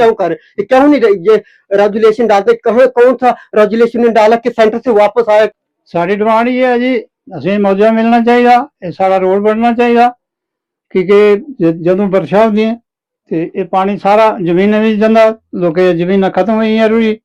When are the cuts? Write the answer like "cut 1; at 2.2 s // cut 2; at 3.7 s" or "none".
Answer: cut 1; at 5.6 s